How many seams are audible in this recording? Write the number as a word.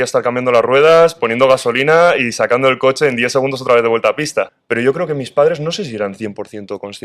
one